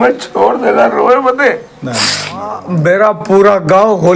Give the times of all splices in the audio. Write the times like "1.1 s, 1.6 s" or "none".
2.6 s